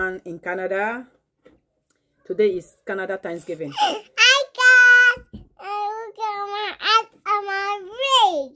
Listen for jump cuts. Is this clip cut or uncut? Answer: uncut